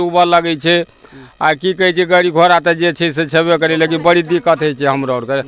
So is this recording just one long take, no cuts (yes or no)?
yes